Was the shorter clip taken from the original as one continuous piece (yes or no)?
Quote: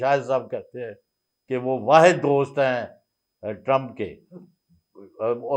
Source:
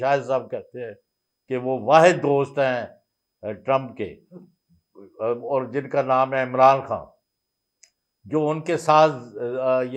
yes